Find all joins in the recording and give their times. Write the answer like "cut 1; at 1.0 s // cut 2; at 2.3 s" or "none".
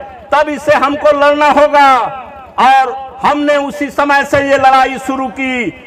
none